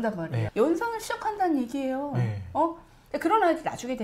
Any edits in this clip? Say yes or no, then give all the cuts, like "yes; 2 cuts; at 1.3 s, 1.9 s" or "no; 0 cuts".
yes; 1 cut; at 2.9 s